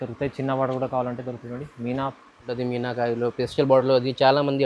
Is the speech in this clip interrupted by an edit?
yes; 1 cut; at 2.5 s

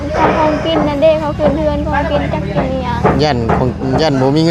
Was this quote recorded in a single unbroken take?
yes; 0 cuts

